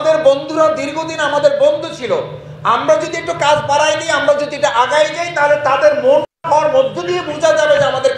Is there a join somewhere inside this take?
yes; 1 cut; at 6.3 s

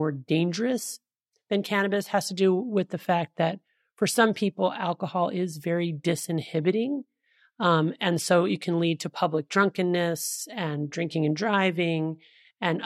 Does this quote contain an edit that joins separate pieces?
no; 0 cuts

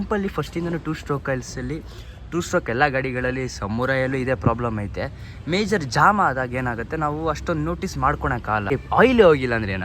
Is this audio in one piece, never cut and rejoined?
no; 1 cut; at 8.7 s

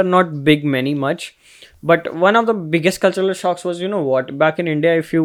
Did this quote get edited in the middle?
no; 0 cuts

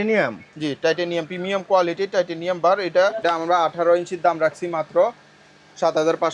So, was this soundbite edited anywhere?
yes; 1 cut; at 3.2 s

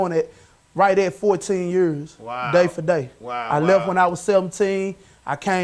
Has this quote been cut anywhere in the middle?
no; 0 cuts

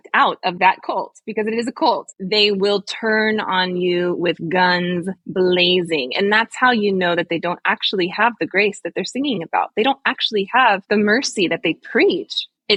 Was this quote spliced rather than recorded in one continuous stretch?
no; 0 cuts

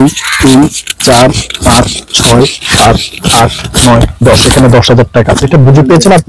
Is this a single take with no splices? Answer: yes; 0 cuts

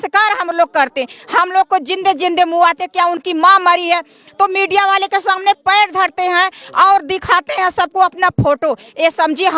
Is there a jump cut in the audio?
no; 0 cuts

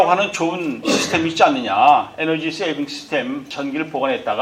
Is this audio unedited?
no; 1 cut; at 3.5 s

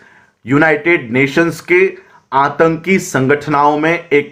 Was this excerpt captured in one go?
yes; 0 cuts

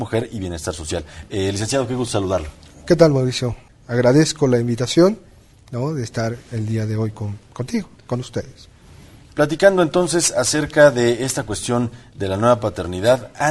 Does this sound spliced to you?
no; 0 cuts

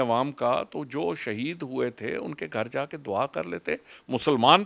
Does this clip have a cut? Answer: no; 0 cuts

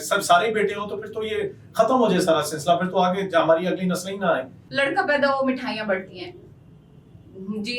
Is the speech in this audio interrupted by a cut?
yes; 1 cut; at 4.6 s

